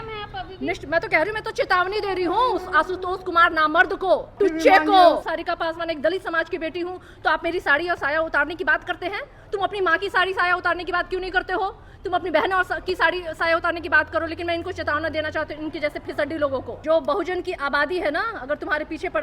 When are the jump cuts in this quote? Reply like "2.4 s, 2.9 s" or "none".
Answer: 4.3 s, 5.3 s, 16.8 s